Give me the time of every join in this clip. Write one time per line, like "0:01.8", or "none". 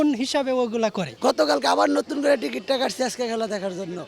0:01.1

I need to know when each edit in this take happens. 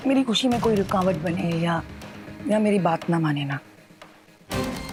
none

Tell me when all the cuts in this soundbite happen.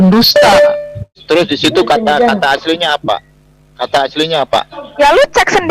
0:01.1

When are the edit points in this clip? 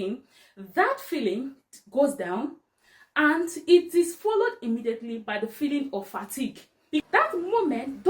0:07.0

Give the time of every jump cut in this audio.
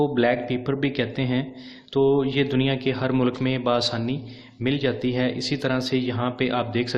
0:02.2

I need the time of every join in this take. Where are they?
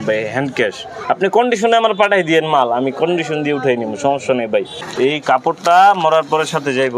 0:04.8

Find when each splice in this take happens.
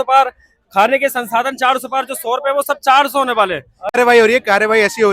0:04.0

